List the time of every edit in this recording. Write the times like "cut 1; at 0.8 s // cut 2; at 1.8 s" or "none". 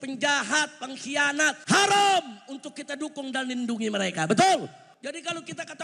cut 1; at 1.6 s // cut 2; at 4.9 s